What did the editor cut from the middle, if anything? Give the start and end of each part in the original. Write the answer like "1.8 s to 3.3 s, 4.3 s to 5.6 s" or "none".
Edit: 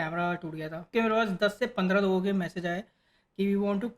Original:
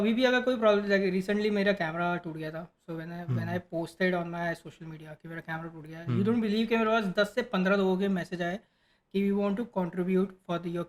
2.7 s to 6.7 s